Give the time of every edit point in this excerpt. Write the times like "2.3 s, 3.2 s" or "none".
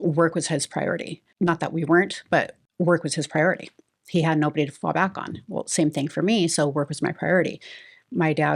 1.2 s, 2.6 s